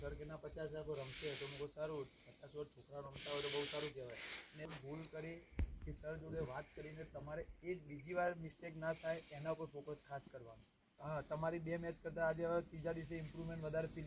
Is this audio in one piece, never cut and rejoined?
no; 2 cuts; at 4.6 s, 11.0 s

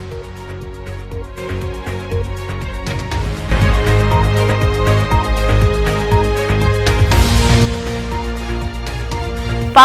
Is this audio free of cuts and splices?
no; 1 cut; at 2.7 s

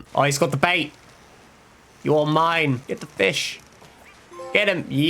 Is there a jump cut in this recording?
yes; 1 cut; at 2.8 s

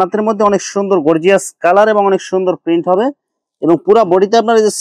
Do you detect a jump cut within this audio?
no; 0 cuts

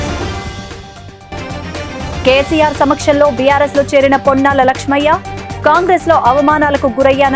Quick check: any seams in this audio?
yes; 1 cut; at 2.1 s

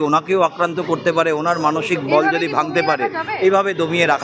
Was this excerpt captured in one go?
yes; 0 cuts

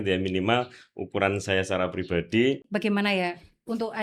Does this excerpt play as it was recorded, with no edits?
no; 1 cut; at 2.7 s

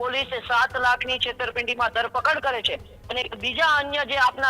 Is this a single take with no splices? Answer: yes; 0 cuts

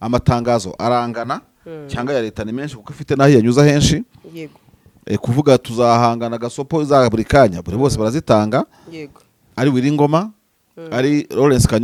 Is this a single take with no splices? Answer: yes; 0 cuts

